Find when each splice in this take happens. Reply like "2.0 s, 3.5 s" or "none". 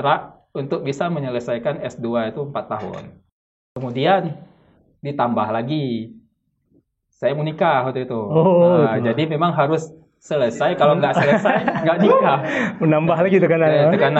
3.5 s

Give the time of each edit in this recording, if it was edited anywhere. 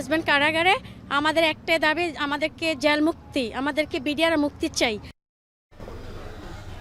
none

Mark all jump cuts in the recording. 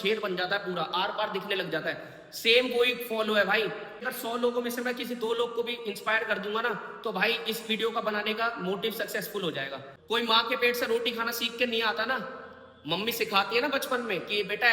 4.1 s, 9.8 s

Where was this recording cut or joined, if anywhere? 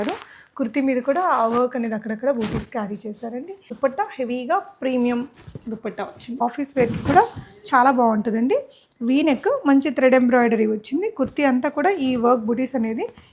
3.6 s, 6.4 s

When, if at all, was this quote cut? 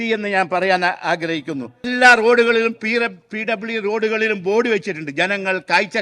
1.9 s

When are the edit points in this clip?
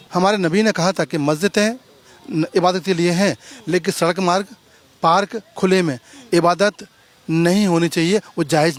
none

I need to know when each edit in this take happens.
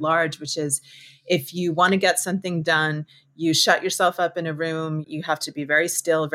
5.0 s

